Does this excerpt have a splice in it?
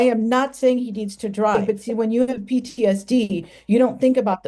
yes; 1 cut; at 1.6 s

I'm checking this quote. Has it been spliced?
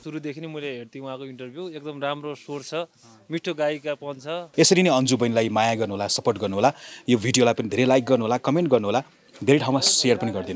yes; 1 cut; at 4.4 s

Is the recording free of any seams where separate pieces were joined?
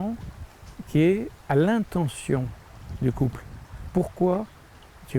no; 1 cut; at 1.3 s

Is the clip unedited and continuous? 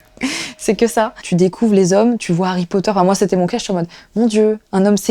no; 1 cut; at 1.2 s

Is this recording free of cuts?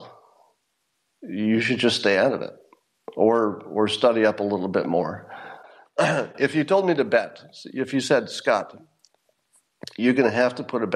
no; 1 cut; at 5.6 s

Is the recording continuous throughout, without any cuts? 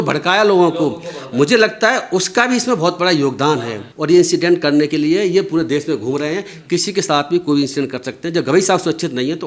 no; 1 cut; at 3.9 s

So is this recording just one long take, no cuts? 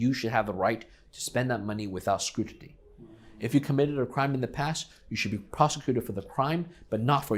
yes; 0 cuts

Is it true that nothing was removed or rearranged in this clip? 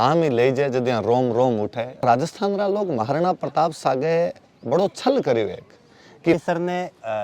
no; 2 cuts; at 2.0 s, 6.3 s

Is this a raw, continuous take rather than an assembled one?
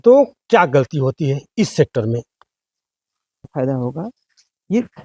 no; 1 cut; at 3.5 s

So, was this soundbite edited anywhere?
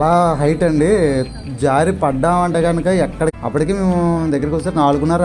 yes; 1 cut; at 3.3 s

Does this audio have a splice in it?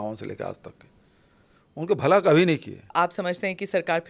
yes; 1 cut; at 2.9 s

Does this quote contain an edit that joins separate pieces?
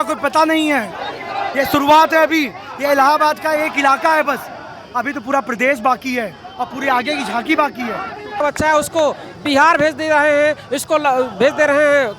yes; 1 cut; at 8.3 s

